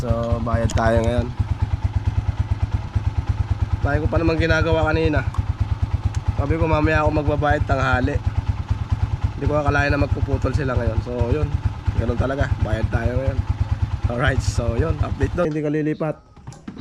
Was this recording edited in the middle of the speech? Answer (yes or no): yes